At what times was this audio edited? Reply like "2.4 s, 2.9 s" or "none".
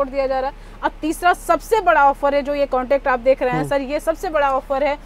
none